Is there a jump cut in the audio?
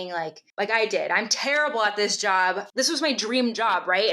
yes; 1 cut; at 2.6 s

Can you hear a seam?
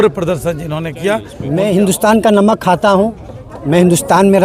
yes; 1 cut; at 1.4 s

